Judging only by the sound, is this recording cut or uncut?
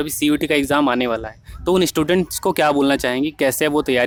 uncut